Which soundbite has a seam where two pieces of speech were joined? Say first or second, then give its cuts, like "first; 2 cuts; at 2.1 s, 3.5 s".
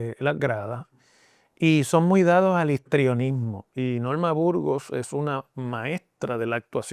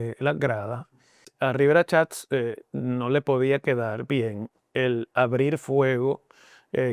second; 1 cut; at 1.3 s